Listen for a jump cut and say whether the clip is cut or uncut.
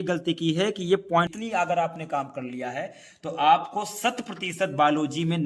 cut